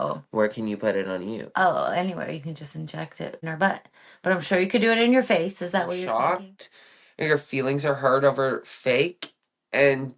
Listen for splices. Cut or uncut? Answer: cut